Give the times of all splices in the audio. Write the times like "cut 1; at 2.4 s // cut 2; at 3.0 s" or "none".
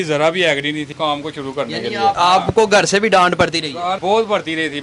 cut 1; at 0.9 s // cut 2; at 2.2 s // cut 3; at 4.0 s